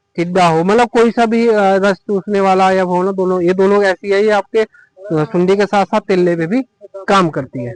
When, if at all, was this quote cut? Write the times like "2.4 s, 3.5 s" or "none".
none